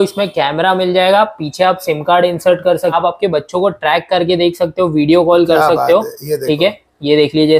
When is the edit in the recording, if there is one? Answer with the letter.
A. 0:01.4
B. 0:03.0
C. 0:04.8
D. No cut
B